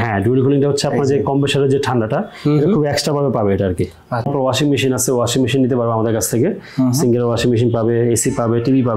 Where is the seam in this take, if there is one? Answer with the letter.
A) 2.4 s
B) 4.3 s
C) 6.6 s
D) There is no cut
B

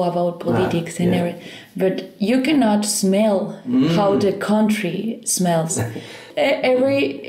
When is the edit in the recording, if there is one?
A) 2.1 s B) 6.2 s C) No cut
B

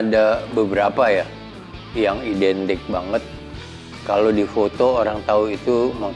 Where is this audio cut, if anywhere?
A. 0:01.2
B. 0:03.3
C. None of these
C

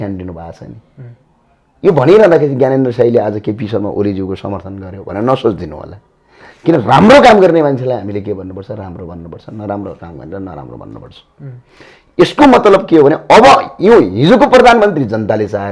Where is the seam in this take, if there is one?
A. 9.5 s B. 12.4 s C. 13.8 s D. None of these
D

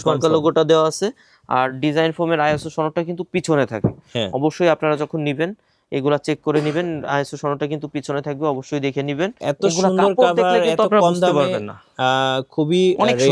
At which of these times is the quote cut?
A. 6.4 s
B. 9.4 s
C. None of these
B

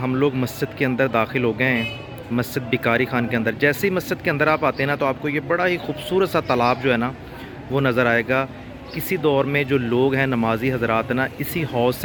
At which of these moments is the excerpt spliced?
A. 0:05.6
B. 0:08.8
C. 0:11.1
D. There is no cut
D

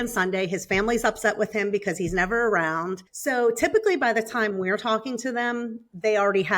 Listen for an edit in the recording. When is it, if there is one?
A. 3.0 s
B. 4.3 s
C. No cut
A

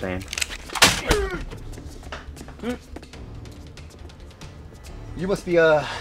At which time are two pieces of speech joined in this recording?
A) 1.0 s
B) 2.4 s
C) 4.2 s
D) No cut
A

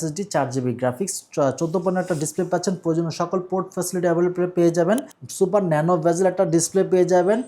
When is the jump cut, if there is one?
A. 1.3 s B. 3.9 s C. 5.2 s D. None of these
C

